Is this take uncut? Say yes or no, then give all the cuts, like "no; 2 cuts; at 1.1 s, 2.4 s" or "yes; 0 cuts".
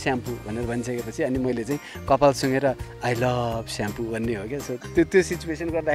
yes; 0 cuts